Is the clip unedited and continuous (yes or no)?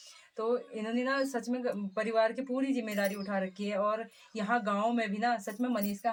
yes